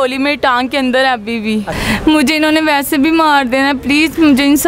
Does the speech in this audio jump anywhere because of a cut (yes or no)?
yes